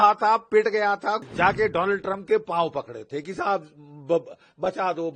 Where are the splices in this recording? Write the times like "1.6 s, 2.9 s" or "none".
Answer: 1.2 s